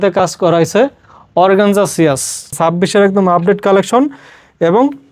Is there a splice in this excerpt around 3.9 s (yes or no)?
no